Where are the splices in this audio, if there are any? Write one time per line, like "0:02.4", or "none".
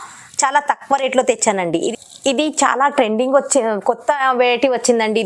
0:01.9